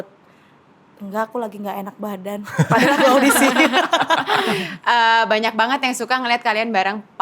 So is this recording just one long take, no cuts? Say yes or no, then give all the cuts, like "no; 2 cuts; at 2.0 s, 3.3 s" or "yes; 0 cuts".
no; 1 cut; at 4.5 s